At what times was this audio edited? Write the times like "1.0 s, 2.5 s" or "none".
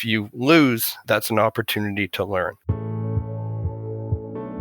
0.9 s, 2.6 s